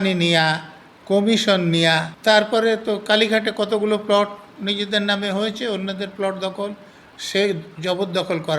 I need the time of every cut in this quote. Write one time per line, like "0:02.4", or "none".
0:02.1